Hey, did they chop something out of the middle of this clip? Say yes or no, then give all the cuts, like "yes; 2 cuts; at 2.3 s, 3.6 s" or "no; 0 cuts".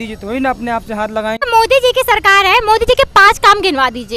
yes; 1 cut; at 1.4 s